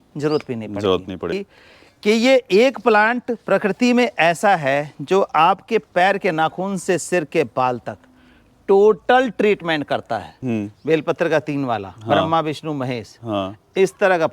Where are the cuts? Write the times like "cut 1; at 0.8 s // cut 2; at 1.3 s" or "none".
cut 1; at 1.3 s // cut 2; at 10.4 s